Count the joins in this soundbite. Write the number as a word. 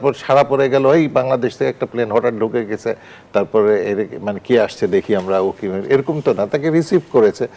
zero